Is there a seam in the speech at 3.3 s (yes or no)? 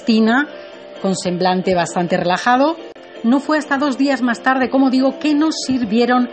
no